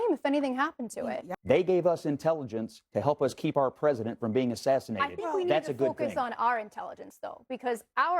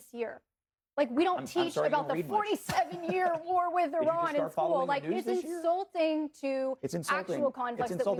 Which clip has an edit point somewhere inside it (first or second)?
first